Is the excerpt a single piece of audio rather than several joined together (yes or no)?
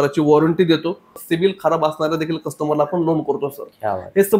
no